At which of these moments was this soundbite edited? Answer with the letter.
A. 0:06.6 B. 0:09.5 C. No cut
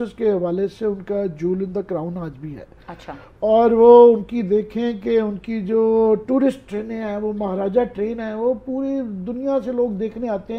C